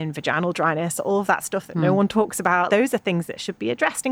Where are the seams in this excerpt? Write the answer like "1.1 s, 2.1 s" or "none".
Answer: 2.7 s